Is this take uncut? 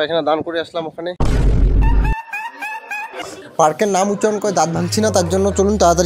yes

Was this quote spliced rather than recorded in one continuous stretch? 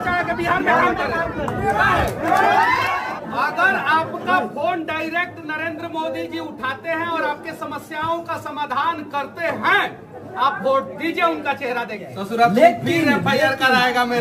yes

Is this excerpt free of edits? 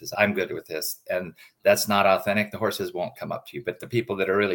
yes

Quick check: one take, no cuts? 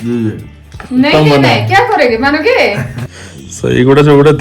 no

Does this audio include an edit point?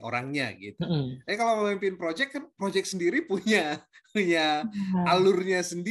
no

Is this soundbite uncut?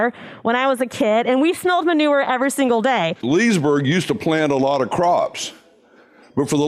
no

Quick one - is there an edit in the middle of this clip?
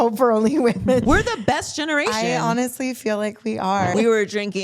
yes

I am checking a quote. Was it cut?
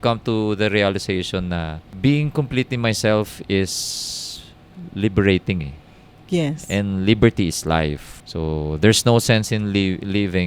no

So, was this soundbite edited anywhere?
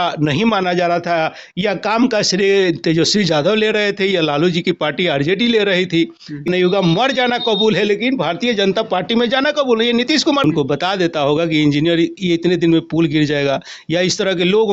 yes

